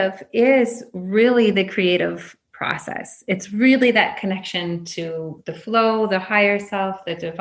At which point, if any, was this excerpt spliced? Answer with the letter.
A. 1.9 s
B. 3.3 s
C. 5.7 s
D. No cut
D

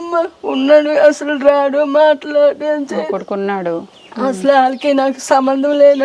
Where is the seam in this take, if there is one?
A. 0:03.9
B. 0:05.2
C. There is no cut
A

